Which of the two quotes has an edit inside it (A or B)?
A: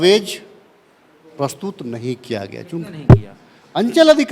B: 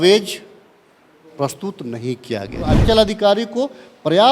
B